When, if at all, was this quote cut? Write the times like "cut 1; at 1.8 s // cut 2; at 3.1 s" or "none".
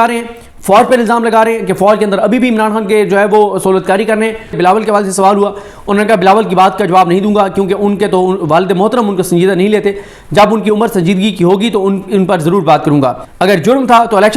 cut 1; at 4.6 s // cut 2; at 13.3 s